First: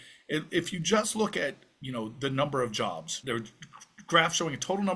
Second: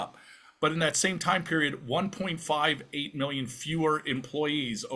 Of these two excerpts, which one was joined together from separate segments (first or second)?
first